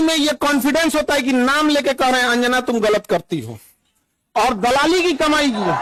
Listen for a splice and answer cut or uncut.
uncut